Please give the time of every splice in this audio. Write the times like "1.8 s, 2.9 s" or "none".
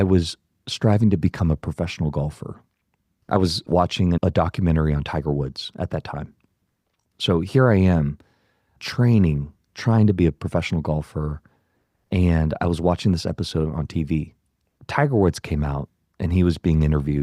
3.7 s, 6.9 s